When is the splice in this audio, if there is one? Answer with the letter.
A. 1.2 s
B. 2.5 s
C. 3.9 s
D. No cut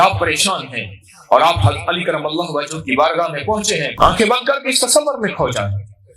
C